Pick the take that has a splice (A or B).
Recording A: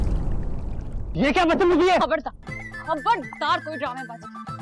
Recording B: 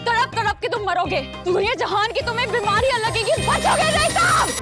A